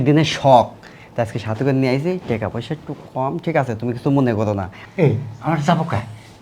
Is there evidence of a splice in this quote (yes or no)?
yes